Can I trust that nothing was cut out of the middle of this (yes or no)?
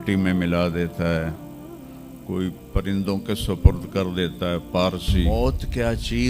no